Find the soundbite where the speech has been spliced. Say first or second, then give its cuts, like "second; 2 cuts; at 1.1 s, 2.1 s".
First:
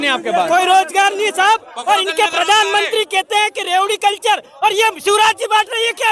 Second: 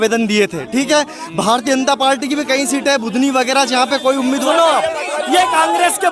second; 1 cut; at 4.4 s